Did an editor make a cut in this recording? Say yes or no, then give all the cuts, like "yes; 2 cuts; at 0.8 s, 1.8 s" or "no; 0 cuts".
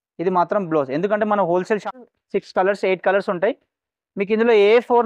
yes; 1 cut; at 1.9 s